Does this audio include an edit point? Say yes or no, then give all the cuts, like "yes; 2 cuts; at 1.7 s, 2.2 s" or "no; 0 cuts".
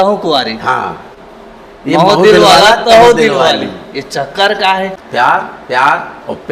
yes; 1 cut; at 5.0 s